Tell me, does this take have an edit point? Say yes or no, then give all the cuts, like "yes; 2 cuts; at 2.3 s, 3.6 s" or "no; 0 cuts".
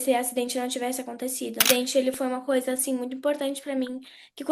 yes; 1 cut; at 1.6 s